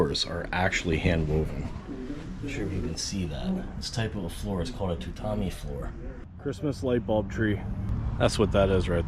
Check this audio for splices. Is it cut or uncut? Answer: cut